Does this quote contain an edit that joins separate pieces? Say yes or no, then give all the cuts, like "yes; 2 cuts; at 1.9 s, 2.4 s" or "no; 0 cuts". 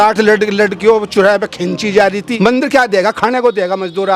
yes; 1 cut; at 2.3 s